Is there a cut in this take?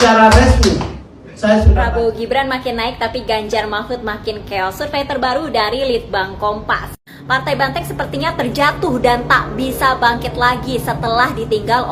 yes; 1 cut; at 1.7 s

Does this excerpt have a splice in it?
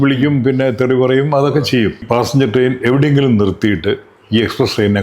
yes; 1 cut; at 2.1 s

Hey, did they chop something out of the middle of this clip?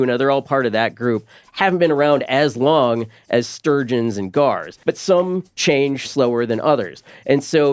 yes; 1 cut; at 4.7 s

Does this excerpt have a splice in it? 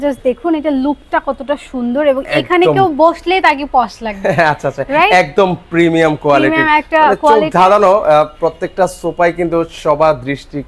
no; 0 cuts

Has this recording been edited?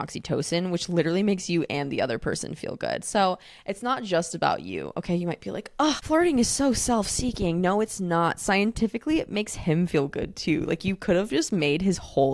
yes; 1 cut; at 6.0 s

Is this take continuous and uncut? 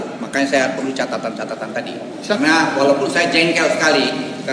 no; 1 cut; at 2.4 s

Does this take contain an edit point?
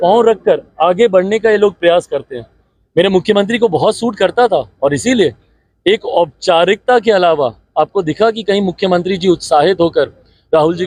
no; 0 cuts

